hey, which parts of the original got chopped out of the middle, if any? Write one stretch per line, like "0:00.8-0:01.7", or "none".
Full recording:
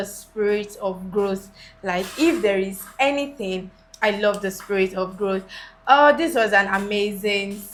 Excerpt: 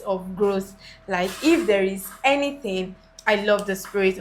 none